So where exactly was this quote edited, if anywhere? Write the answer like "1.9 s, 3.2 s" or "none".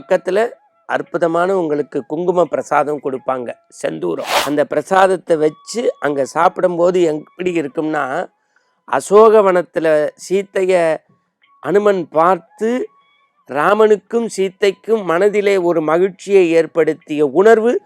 4.3 s